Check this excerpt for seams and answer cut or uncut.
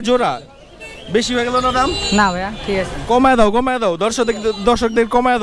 uncut